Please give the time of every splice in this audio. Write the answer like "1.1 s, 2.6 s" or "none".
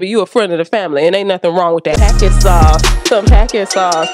2.0 s